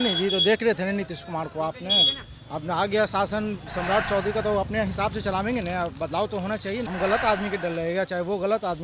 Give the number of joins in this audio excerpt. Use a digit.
1